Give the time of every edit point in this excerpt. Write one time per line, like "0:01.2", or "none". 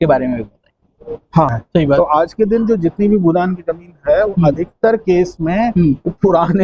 0:01.6